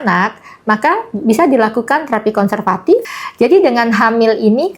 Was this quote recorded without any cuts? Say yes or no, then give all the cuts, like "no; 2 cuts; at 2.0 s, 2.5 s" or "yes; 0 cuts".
no; 1 cut; at 3.0 s